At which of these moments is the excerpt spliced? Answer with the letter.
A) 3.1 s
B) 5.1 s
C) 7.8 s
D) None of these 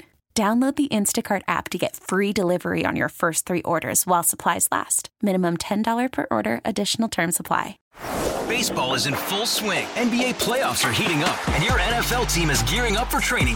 C